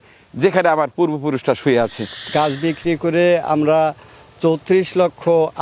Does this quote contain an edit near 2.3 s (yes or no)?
yes